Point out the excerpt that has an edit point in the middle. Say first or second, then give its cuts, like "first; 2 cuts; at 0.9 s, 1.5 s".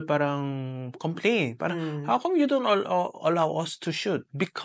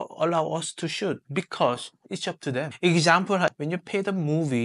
second; 2 cuts; at 2.7 s, 3.5 s